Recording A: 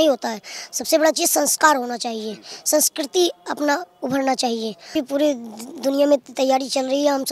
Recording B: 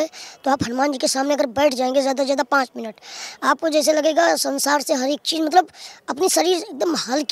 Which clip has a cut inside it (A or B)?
A